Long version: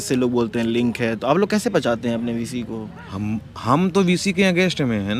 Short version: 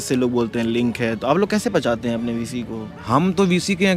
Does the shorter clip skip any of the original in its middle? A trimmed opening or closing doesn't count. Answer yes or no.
yes